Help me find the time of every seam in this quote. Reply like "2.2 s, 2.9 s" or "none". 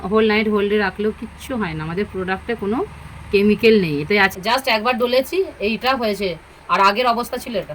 4.3 s